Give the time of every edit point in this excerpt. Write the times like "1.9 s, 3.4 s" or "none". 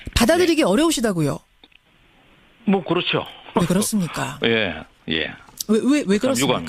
3.4 s